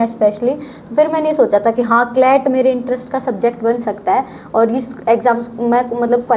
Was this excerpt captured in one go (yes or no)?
yes